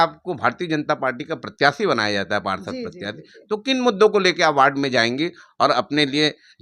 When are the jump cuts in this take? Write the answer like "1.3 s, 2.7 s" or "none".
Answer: none